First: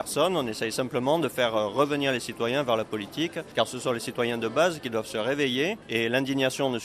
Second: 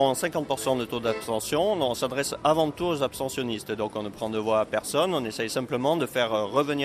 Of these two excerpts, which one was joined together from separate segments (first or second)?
first